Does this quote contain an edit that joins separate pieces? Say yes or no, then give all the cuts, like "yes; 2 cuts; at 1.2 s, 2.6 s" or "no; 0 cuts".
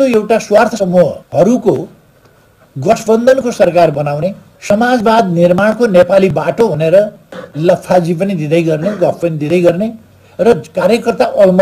yes; 2 cuts; at 1.2 s, 4.5 s